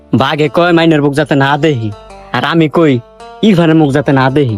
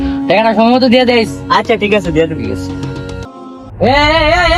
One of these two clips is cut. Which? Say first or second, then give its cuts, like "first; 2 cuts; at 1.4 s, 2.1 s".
second; 1 cut; at 3.2 s